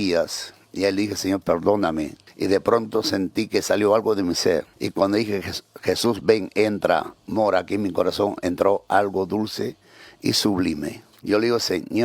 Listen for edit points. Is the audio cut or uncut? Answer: cut